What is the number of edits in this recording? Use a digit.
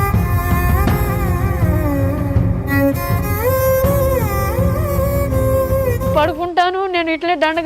1